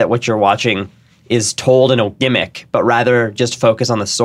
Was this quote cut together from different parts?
no; 0 cuts

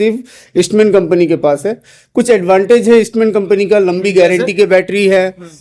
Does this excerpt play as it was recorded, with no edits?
yes; 0 cuts

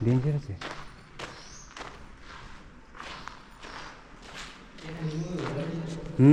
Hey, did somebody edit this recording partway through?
no; 0 cuts

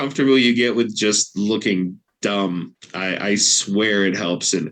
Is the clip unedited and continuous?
no; 2 cuts; at 2.0 s, 2.8 s

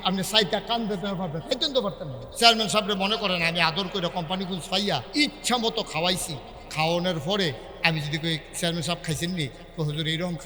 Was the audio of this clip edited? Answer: yes; 2 cuts; at 2.2 s, 5.1 s

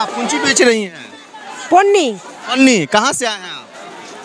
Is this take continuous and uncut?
yes; 0 cuts

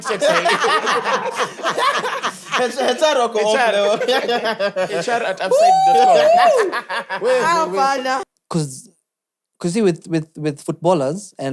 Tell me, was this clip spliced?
yes; 1 cut; at 8.3 s

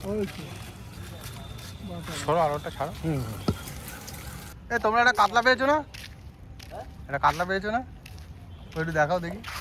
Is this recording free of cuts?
no; 1 cut; at 4.4 s

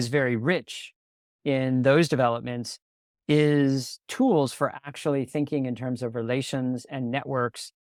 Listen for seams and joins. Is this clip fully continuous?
yes; 0 cuts

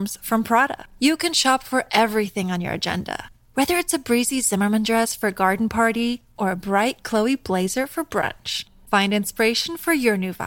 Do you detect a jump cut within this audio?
no; 0 cuts

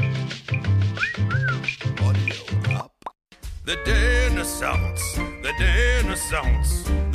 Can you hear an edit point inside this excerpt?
yes; 1 cut; at 3.6 s

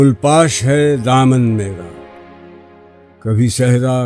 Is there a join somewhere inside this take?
yes; 2 cuts; at 1.8 s, 3.1 s

